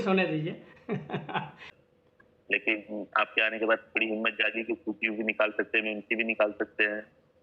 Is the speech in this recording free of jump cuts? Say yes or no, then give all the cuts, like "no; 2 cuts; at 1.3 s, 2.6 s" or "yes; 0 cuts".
no; 1 cut; at 1.8 s